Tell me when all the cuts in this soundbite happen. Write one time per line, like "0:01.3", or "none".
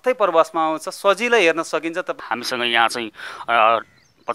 0:02.1